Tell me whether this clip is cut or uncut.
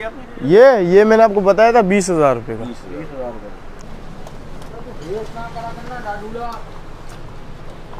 cut